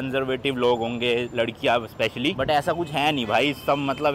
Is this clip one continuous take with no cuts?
yes; 0 cuts

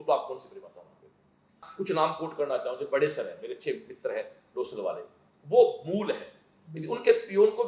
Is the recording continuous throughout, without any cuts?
no; 1 cut; at 1.7 s

